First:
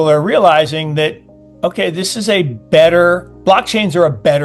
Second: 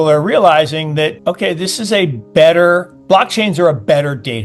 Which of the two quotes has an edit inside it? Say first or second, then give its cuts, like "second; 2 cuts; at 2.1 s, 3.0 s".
second; 1 cut; at 1.2 s